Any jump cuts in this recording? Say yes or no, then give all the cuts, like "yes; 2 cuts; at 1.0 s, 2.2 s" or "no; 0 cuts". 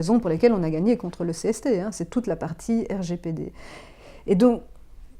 no; 0 cuts